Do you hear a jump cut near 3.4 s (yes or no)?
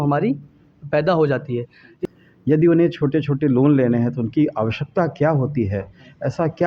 no